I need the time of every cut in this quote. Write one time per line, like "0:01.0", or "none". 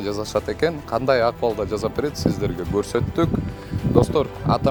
none